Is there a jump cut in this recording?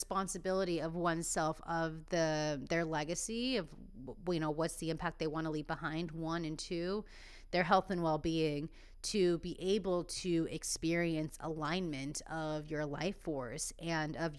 no; 0 cuts

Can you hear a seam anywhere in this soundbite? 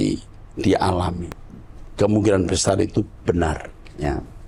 no; 0 cuts

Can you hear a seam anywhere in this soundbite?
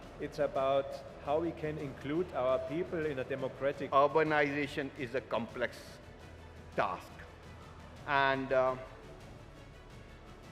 yes; 1 cut; at 3.8 s

